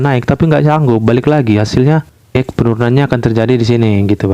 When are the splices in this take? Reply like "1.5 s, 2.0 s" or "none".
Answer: 2.4 s